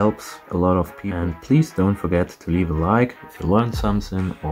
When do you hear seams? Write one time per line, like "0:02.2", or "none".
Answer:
0:01.1